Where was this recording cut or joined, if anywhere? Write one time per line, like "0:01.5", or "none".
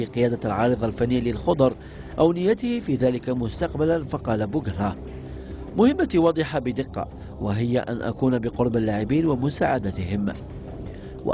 0:09.7